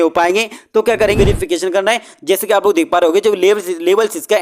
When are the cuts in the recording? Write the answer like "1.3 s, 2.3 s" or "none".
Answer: 1.1 s